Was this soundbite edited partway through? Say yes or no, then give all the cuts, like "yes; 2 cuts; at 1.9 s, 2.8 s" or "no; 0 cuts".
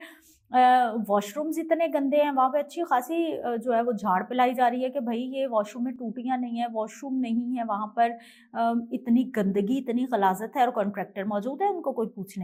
no; 0 cuts